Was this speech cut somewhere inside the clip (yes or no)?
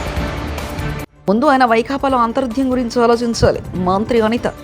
yes